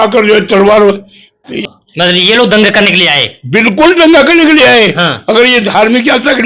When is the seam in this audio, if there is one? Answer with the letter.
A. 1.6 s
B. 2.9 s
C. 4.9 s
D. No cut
A